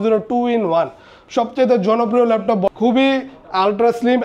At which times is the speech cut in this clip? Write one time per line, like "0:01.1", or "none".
0:02.7